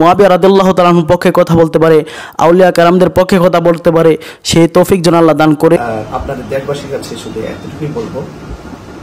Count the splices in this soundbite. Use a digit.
1